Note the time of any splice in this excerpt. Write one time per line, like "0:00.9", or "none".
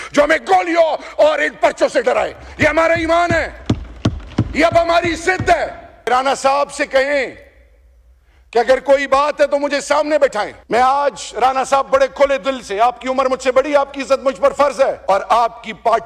0:06.1
0:10.6
0:15.0